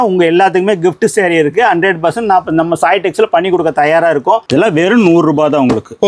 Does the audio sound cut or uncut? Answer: cut